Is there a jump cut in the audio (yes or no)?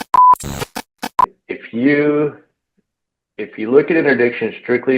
yes